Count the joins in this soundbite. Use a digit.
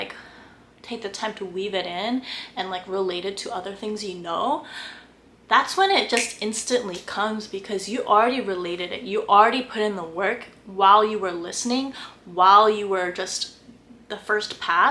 0